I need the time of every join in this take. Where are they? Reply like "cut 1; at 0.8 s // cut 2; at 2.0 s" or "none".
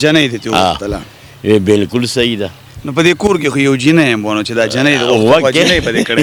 none

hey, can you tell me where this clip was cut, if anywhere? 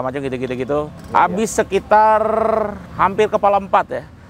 cut 1; at 1.0 s // cut 2; at 2.8 s

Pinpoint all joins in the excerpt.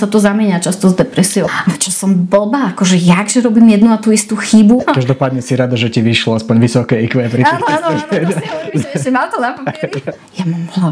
cut 1; at 1.5 s // cut 2; at 4.8 s // cut 3; at 10.1 s

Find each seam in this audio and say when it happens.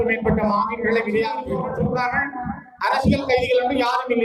cut 1; at 1.6 s

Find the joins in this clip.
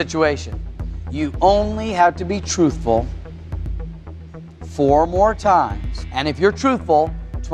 cut 1; at 3.8 s

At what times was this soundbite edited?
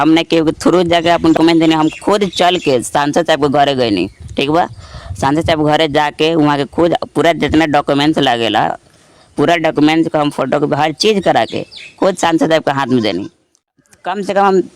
cut 1; at 1.4 s // cut 2; at 13.8 s

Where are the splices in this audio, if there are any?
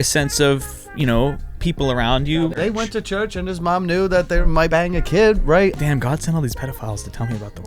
cut 1; at 2.5 s // cut 2; at 4.6 s // cut 3; at 5.7 s

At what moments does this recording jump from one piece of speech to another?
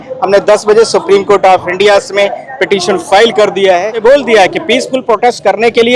cut 1; at 4.0 s

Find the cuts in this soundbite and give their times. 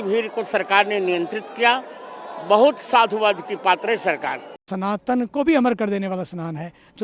cut 1; at 4.6 s

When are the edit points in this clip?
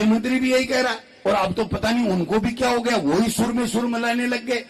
cut 1; at 1.1 s

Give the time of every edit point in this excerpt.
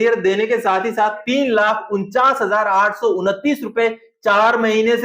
cut 1; at 1.2 s

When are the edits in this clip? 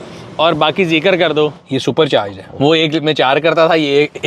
cut 1; at 1.6 s // cut 2; at 2.4 s

